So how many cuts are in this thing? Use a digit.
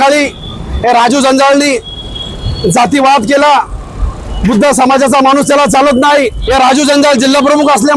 1